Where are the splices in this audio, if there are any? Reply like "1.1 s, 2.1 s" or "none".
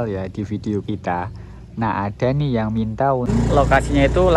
3.3 s